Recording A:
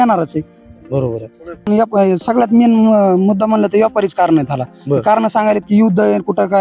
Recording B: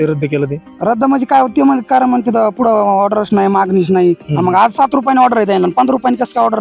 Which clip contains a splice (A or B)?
A